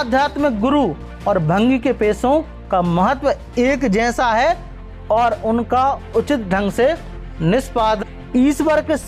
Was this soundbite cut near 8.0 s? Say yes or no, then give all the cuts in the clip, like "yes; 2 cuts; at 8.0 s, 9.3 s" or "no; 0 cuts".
yes; 1 cut; at 8.0 s